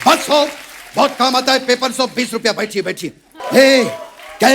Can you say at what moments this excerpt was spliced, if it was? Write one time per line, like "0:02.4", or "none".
0:03.3